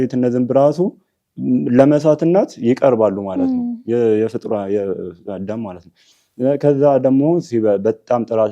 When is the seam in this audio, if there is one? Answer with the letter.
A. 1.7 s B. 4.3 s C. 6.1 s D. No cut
D